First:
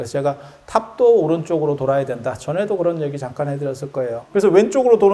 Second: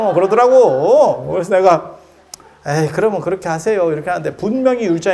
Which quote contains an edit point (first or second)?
first